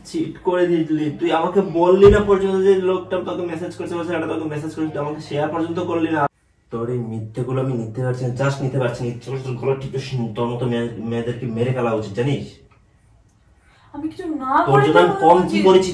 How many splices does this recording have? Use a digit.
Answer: 1